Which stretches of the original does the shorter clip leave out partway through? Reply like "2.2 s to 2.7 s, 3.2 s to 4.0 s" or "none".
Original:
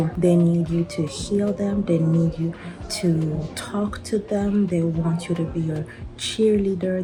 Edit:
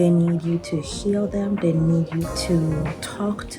2.6 s to 2.9 s